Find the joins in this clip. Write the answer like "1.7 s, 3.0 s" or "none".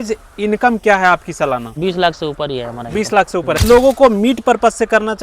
1.7 s, 3.6 s